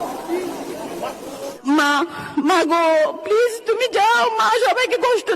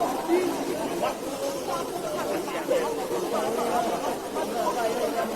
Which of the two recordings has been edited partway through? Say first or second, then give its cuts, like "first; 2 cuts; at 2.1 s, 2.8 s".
first; 1 cut; at 1.5 s